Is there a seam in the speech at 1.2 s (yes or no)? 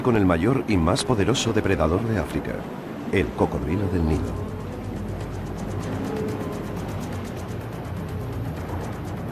no